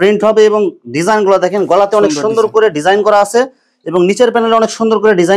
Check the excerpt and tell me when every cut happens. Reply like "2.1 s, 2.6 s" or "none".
none